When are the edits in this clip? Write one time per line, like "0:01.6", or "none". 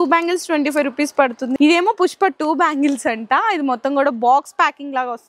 0:01.5